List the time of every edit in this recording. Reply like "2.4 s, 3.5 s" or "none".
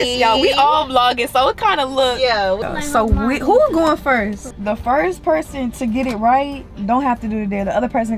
2.6 s, 4.5 s